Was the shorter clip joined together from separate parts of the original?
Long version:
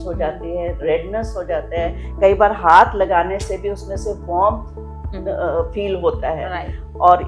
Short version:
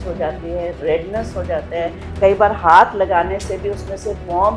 no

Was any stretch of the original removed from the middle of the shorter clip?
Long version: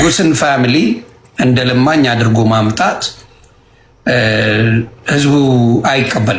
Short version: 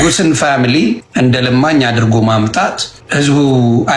yes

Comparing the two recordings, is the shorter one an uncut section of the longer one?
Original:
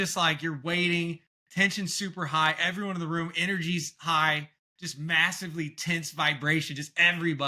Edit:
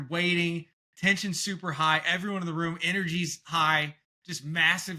yes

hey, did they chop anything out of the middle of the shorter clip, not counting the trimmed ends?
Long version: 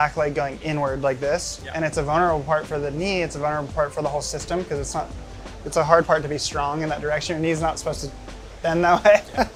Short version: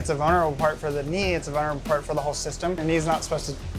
yes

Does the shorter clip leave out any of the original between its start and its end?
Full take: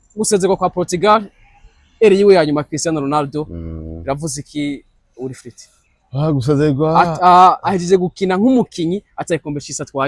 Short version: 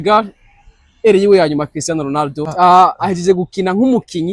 yes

